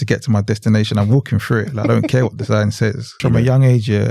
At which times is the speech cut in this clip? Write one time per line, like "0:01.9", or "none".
0:03.2